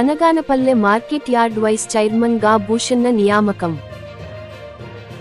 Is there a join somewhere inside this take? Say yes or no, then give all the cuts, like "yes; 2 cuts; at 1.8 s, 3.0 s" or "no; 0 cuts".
no; 0 cuts